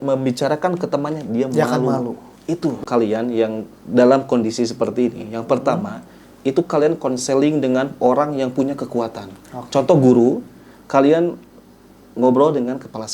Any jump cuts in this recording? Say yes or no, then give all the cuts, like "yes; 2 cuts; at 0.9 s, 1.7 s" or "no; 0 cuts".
yes; 1 cut; at 2.9 s